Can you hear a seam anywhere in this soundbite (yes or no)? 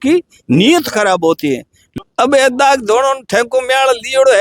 yes